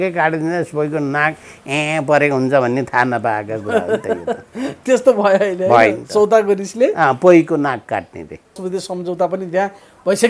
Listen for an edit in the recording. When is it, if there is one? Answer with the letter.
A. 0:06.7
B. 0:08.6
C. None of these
B